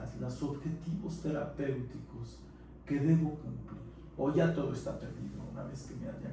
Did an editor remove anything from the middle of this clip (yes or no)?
no